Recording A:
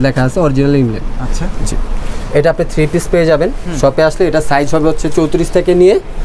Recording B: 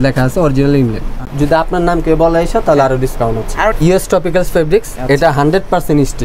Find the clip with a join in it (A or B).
B